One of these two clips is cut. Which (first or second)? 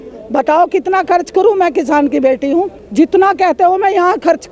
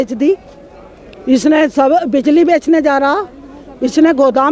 first